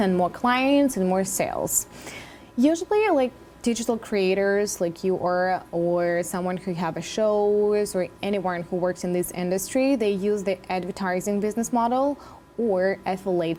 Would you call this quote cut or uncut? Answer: uncut